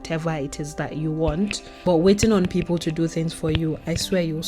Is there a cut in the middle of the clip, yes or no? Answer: no